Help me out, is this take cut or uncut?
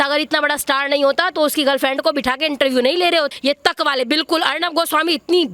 cut